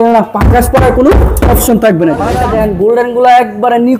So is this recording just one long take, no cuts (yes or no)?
no